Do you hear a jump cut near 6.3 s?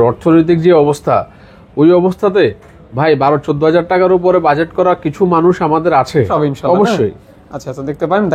yes; 1 cut; at 6.3 s

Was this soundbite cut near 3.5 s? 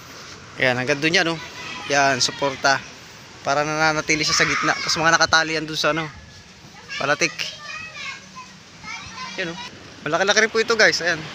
no; 1 cut; at 9.7 s

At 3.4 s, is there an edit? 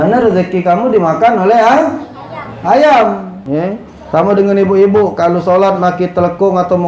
yes; 1 cut; at 3.4 s

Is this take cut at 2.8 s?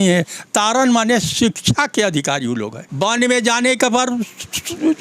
yes; 1 cut; at 2.8 s

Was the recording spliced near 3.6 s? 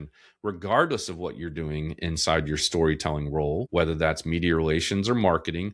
yes; 1 cut; at 3.6 s

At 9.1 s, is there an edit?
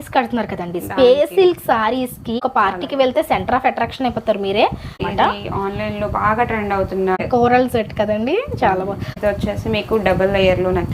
yes; 4 cuts; at 2.4 s, 5.0 s, 7.2 s, 9.1 s

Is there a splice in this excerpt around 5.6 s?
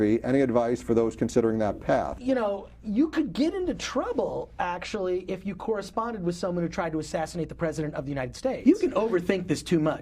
no; 2 cuts; at 2.1 s, 8.6 s

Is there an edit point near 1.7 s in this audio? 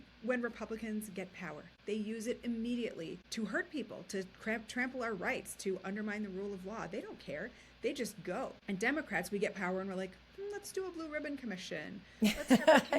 yes; 3 cuts; at 1.7 s, 3.2 s, 8.6 s

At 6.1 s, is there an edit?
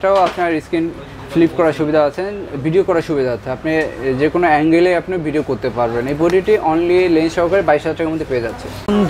no; 0 cuts

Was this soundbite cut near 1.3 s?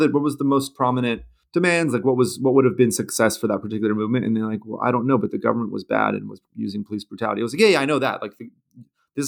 yes; 2 cuts; at 1.3 s, 6.4 s

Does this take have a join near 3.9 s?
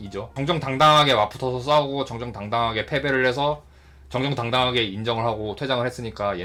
no; 0 cuts

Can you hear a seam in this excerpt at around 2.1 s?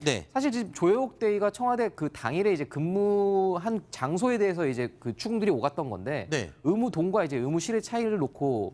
yes; 1 cut; at 2.1 s

